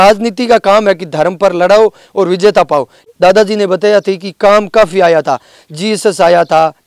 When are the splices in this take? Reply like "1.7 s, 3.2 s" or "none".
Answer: 3.0 s

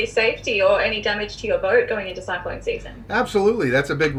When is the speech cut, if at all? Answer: none

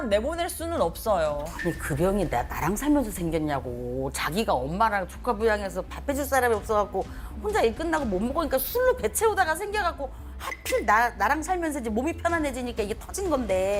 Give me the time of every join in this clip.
none

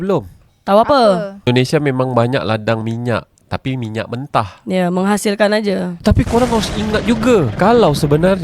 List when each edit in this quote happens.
1.5 s, 5.9 s

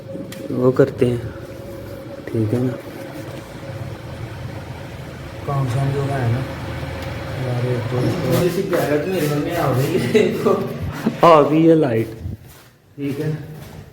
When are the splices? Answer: 8.2 s

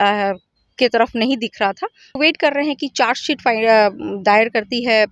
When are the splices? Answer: 2.2 s

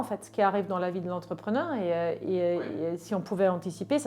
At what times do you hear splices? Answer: none

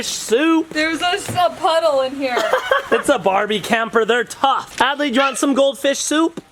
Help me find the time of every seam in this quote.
none

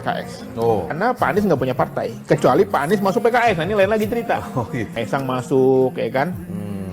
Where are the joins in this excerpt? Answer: 0.9 s, 4.9 s

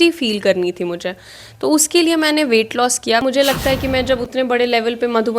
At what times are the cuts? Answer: 3.2 s

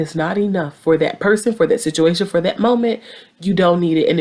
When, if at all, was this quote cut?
none

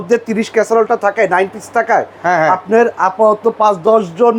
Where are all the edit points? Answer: none

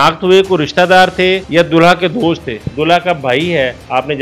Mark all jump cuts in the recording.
2.7 s

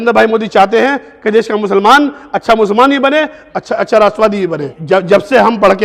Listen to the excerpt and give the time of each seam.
4.7 s

